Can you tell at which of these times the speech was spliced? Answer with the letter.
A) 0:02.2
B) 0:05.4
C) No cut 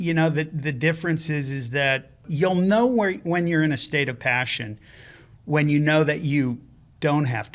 A